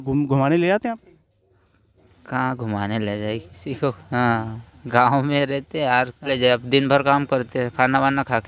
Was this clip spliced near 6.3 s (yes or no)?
yes